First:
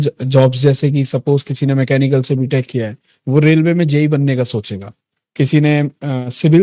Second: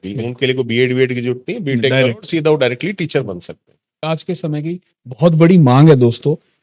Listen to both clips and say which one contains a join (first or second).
second